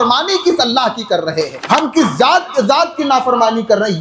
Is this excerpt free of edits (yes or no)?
no